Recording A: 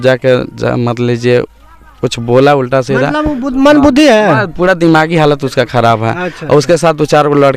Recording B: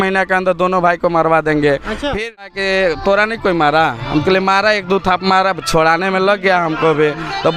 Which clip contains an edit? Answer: B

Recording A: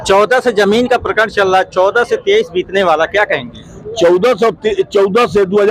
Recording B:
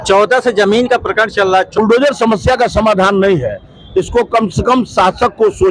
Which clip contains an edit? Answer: B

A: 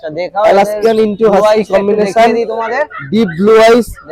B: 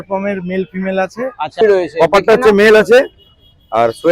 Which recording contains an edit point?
B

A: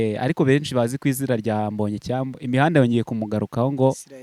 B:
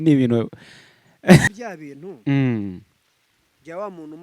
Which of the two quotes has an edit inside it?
B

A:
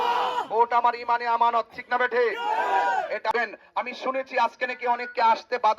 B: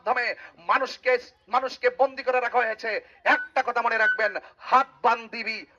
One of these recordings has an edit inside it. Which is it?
A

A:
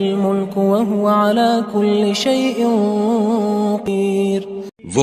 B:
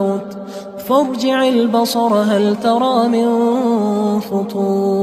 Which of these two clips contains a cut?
A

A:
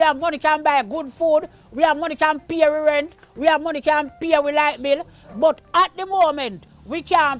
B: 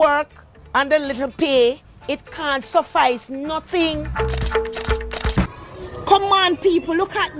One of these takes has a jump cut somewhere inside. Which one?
B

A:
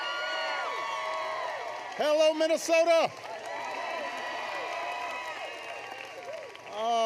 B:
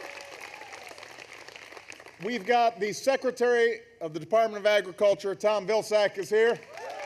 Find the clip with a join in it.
B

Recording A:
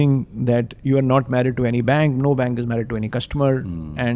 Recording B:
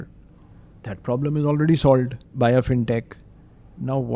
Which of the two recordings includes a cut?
B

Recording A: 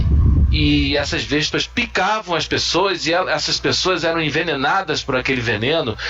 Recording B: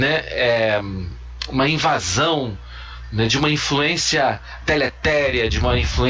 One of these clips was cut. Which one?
A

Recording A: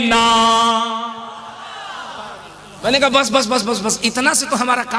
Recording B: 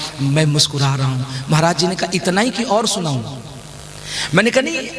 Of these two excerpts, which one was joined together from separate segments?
A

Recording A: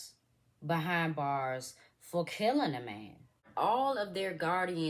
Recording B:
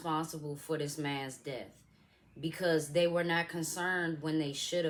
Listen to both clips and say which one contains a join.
A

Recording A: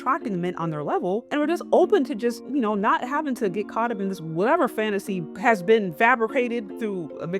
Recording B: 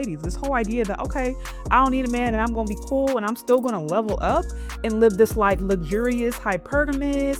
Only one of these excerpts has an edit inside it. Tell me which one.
A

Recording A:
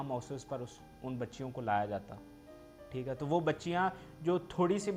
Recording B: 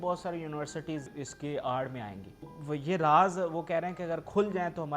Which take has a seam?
B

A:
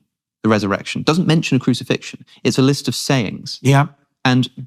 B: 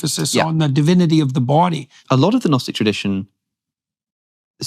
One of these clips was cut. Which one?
B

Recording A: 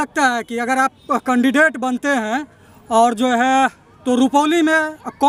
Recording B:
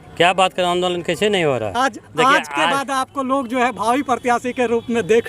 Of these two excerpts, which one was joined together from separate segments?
B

